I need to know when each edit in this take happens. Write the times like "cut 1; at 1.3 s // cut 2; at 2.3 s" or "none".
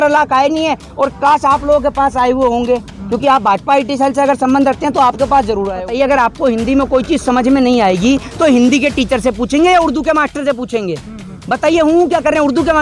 cut 1; at 5.8 s